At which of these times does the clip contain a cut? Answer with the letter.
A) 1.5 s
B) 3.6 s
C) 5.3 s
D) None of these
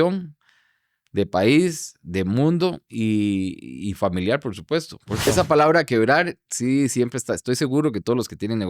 C